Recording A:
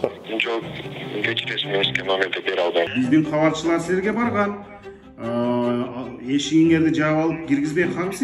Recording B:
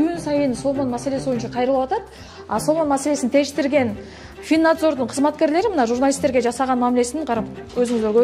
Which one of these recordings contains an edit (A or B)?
A